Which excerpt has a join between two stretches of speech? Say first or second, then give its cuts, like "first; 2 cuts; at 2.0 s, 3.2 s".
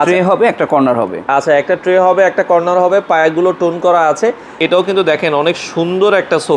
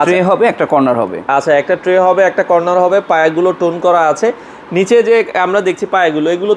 first; 1 cut; at 4.6 s